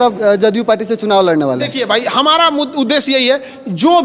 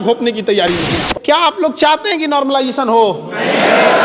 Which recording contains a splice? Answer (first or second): second